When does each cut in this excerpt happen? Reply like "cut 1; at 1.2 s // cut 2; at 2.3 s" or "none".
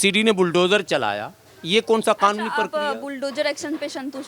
none